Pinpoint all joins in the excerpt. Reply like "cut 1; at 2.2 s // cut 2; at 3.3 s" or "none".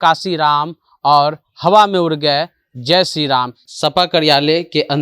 cut 1; at 3.6 s

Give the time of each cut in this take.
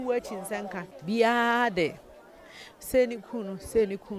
cut 1; at 0.9 s

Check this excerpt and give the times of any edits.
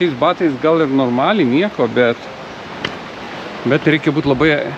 cut 1; at 3.2 s

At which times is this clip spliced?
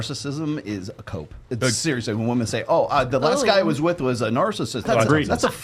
cut 1; at 1.4 s // cut 2; at 4.8 s

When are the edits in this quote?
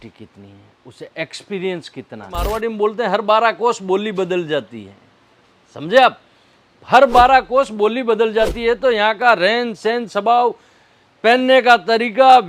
cut 1; at 2.4 s

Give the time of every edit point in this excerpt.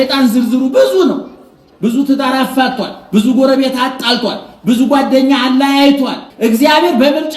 cut 1; at 6.2 s

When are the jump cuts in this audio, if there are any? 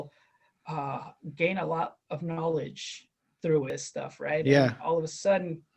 cut 1; at 3.7 s

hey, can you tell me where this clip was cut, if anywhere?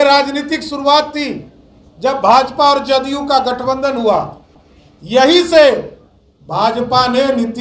none

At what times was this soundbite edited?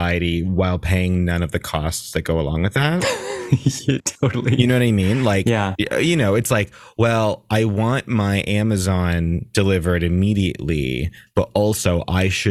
cut 1; at 5.7 s

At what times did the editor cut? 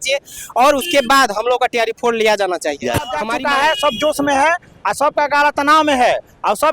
cut 1; at 3.3 s

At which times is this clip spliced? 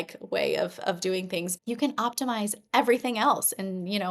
cut 1; at 1.5 s

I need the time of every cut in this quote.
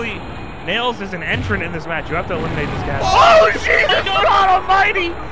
cut 1; at 3.0 s

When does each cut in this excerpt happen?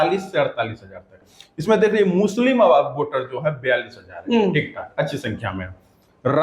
cut 1; at 1.1 s

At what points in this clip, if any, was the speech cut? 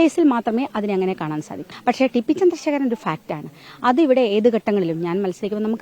cut 1; at 1.6 s

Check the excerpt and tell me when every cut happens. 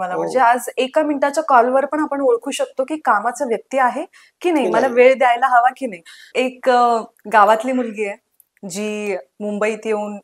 cut 1; at 6.2 s

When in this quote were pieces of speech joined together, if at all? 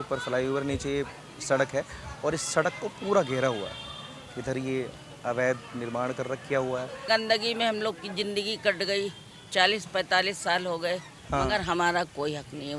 cut 1; at 7.1 s // cut 2; at 11.2 s

